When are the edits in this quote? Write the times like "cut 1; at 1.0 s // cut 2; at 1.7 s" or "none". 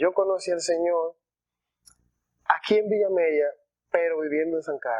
none